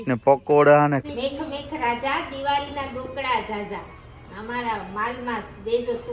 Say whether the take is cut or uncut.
cut